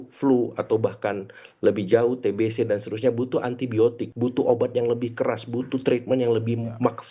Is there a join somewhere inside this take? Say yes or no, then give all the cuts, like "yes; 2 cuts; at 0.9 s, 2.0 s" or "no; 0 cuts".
yes; 1 cut; at 4.1 s